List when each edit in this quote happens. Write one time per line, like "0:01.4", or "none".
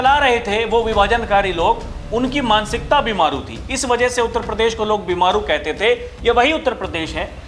none